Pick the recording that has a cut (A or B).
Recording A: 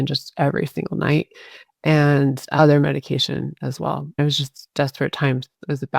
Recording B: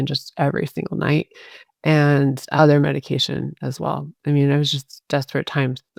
A